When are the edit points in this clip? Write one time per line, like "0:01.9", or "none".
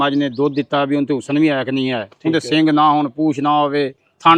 none